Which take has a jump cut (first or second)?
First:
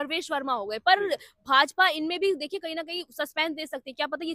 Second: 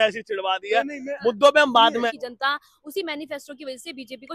second